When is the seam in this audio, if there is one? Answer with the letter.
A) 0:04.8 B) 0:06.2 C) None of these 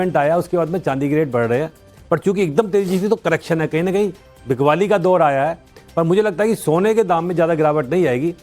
B